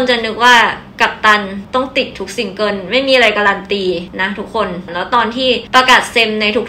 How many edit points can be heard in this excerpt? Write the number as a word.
two